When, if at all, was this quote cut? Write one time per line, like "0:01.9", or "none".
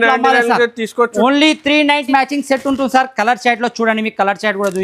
0:02.0